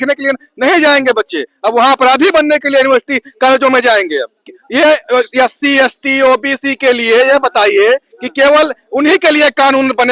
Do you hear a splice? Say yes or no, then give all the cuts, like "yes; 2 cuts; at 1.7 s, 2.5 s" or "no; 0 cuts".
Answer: yes; 1 cut; at 4.3 s